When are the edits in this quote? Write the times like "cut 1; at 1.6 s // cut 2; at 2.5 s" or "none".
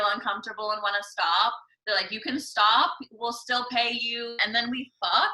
cut 1; at 4.4 s